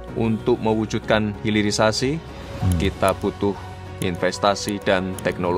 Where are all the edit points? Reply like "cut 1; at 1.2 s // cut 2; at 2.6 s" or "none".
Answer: none